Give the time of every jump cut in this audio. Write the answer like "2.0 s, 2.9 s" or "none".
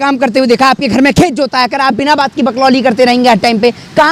none